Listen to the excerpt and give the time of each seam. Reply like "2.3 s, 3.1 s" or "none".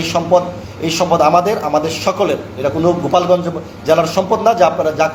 none